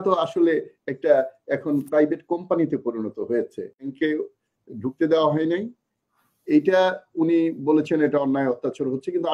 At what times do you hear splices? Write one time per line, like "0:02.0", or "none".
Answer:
0:03.9

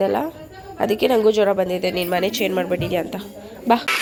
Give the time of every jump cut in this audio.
none

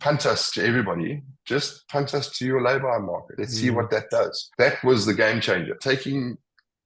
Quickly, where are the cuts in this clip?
0:03.4
0:04.4
0:05.8

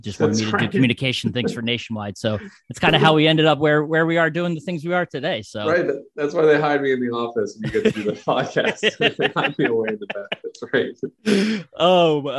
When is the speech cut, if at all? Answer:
none

